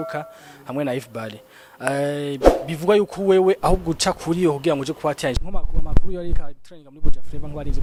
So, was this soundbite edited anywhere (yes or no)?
no